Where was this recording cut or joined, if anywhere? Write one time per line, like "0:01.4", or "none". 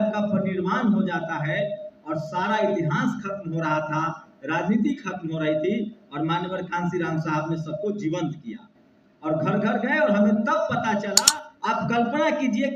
0:11.2